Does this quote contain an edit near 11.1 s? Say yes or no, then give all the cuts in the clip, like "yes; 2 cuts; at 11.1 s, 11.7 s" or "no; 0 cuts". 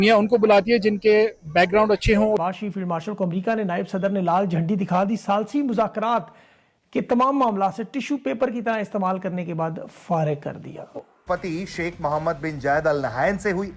yes; 2 cuts; at 2.4 s, 11.1 s